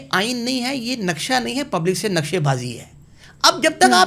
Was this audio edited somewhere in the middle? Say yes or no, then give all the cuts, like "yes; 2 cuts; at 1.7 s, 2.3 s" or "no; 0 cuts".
no; 0 cuts